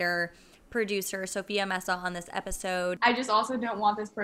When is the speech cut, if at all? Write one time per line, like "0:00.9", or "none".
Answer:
0:03.0